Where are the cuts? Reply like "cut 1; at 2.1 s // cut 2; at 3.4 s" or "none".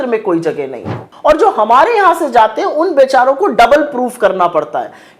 cut 1; at 1.0 s